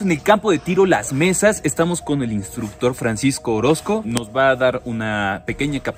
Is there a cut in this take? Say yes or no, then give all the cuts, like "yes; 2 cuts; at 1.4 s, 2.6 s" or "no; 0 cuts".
no; 0 cuts